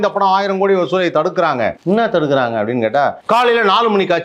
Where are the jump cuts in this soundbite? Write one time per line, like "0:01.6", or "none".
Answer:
0:01.8
0:03.2